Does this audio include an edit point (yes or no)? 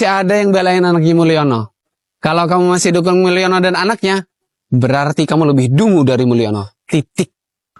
no